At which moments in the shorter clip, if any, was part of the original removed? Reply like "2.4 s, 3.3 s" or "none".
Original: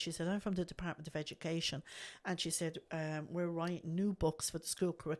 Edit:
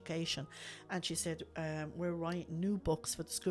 none